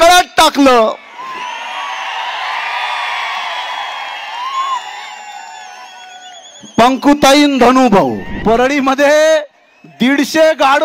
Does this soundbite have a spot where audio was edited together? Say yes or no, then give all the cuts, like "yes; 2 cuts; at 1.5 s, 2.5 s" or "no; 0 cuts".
yes; 1 cut; at 8.3 s